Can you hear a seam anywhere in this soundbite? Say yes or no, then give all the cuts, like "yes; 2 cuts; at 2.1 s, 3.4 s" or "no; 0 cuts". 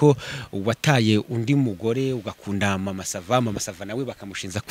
no; 0 cuts